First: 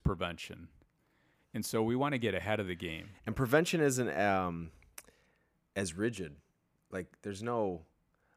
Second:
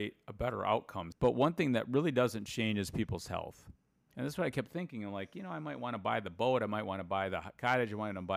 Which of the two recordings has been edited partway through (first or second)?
second